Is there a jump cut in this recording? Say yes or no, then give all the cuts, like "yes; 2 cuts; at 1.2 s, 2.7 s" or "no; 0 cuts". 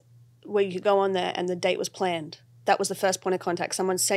no; 0 cuts